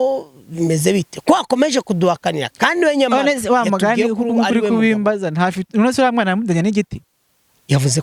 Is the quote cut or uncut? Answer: uncut